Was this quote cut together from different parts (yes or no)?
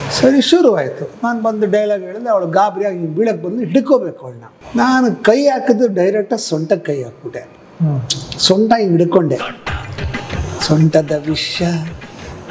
no